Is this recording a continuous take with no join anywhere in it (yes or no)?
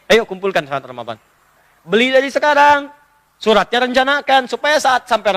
no